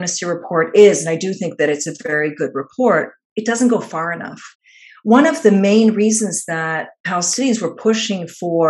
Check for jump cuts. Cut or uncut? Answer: uncut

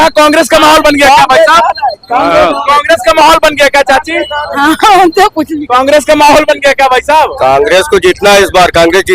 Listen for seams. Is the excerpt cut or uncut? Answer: uncut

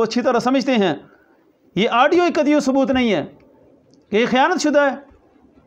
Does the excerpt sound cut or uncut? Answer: uncut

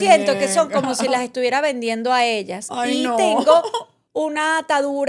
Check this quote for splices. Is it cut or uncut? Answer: uncut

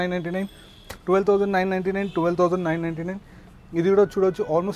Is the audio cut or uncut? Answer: uncut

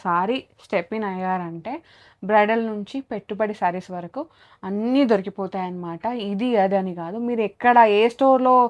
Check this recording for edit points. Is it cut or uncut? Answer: uncut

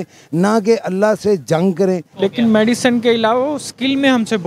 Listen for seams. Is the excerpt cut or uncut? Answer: cut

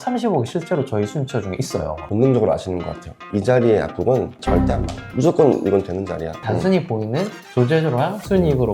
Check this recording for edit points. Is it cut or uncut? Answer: cut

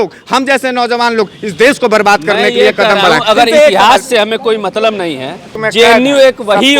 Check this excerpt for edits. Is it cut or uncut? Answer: cut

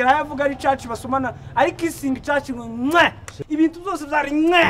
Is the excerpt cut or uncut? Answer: uncut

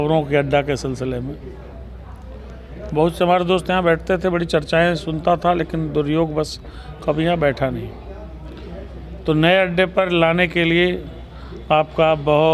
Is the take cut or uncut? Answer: uncut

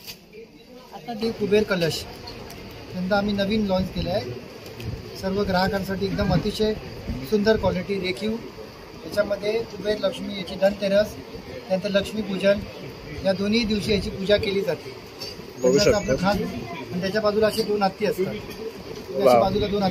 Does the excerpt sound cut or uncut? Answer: cut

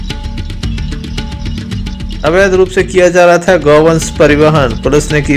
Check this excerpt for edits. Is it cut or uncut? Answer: cut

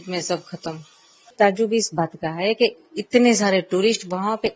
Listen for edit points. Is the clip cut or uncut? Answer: cut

